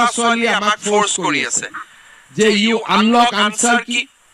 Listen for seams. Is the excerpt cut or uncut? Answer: uncut